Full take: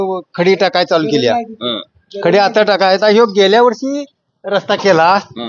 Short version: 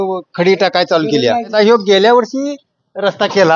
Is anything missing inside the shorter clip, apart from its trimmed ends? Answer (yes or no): yes